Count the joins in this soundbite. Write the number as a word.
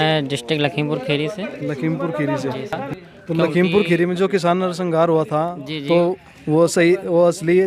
one